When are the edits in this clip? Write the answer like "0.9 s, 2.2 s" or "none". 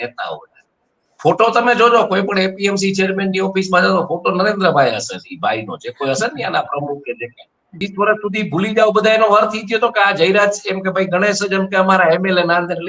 7.7 s